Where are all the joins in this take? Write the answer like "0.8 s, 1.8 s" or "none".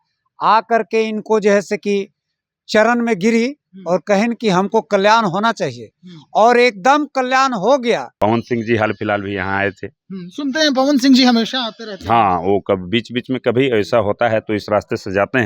8.1 s